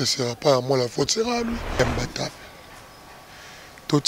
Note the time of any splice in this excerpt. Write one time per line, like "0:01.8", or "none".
0:01.8